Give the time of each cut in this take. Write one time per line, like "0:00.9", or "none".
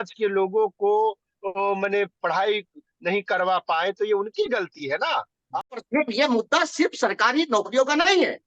0:05.8